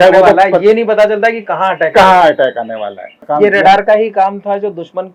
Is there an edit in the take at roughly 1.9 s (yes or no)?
no